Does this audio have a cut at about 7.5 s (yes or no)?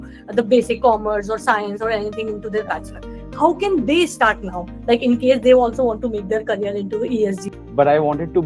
yes